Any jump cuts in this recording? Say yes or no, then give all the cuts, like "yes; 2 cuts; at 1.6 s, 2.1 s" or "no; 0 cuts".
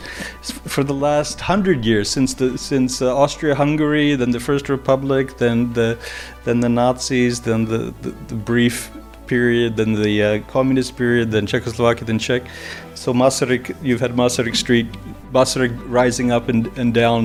no; 0 cuts